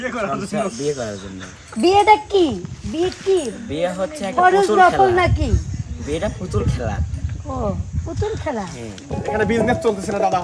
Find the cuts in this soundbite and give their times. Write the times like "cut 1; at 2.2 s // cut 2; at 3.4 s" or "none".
cut 1; at 9.0 s